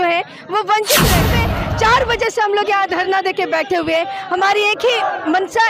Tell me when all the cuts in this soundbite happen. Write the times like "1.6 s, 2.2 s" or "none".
1.4 s